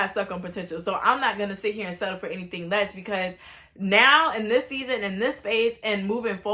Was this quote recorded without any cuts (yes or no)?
yes